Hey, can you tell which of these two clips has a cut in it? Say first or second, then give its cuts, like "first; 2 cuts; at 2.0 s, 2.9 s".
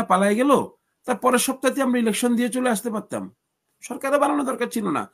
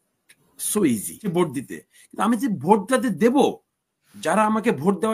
second; 1 cut; at 1.3 s